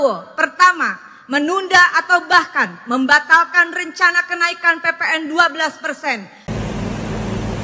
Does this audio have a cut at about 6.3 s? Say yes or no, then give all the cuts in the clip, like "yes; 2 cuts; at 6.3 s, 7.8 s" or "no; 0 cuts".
yes; 1 cut; at 6.3 s